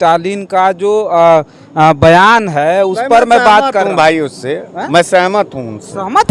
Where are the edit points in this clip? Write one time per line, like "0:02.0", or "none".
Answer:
none

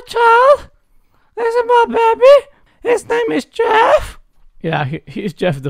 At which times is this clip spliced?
none

